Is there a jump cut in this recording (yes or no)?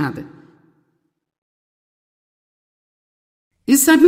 no